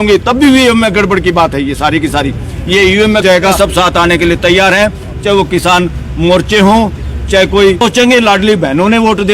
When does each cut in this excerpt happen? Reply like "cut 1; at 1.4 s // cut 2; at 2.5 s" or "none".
cut 1; at 3.3 s // cut 2; at 7.8 s